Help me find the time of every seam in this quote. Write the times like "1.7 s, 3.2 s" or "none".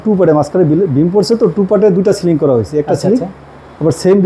none

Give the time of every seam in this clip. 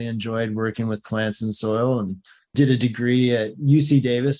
none

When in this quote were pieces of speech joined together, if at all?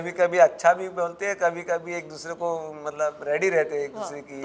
none

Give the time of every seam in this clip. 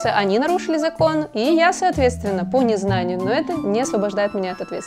3.5 s

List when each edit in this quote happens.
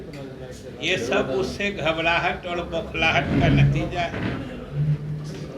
none

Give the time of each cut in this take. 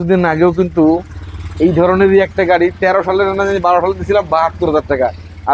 none

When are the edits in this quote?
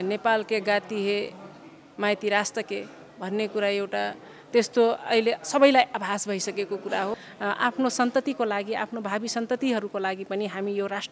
7.3 s

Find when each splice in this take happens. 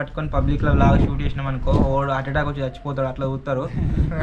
none

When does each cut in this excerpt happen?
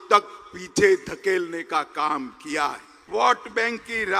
3.1 s

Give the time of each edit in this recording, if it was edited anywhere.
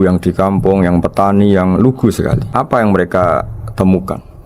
2.4 s

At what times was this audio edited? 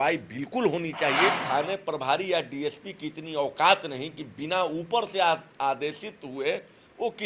1.3 s

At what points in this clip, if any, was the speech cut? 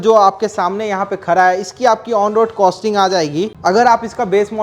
3.5 s

